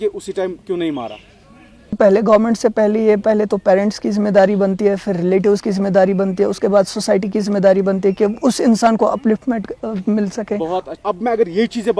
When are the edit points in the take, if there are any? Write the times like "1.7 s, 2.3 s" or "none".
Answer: 2.0 s, 10.9 s